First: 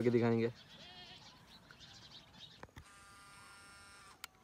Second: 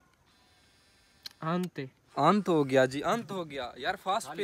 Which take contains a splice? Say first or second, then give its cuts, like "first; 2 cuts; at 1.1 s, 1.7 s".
first; 1 cut; at 2.5 s